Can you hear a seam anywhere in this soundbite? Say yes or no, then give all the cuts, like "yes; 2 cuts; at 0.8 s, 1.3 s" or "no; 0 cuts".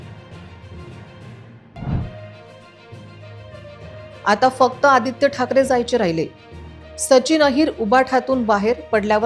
yes; 1 cut; at 1.1 s